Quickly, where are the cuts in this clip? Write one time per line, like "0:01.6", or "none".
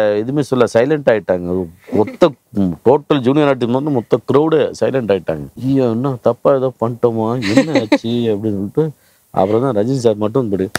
0:05.5